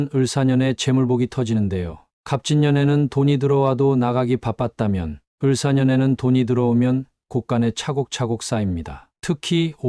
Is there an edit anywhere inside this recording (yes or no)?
no